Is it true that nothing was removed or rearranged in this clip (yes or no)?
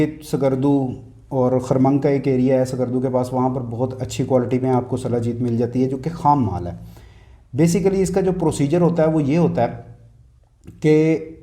yes